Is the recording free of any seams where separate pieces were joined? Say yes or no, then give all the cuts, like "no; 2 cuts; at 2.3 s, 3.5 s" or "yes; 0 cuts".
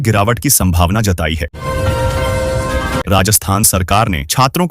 no; 2 cuts; at 1.5 s, 3.0 s